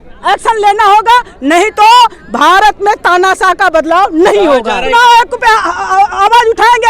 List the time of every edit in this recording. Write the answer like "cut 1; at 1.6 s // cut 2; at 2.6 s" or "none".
cut 1; at 4.9 s